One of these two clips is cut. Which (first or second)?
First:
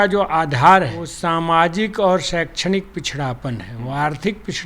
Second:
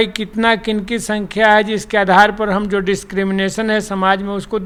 first